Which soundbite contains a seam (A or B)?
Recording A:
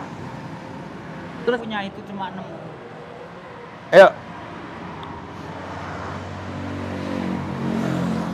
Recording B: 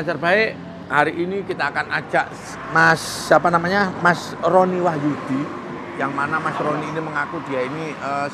A